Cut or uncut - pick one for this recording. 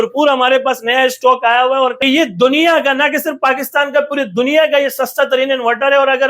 cut